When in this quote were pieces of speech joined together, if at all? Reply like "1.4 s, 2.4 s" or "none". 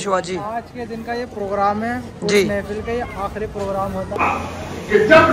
4.1 s